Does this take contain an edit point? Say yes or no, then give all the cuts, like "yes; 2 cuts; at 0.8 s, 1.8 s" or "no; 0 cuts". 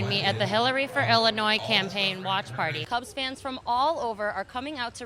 yes; 1 cut; at 2.8 s